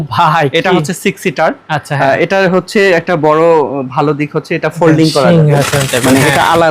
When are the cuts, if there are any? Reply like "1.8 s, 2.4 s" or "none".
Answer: none